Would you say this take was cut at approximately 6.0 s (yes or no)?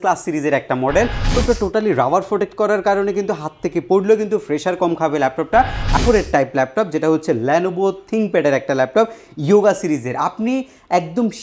yes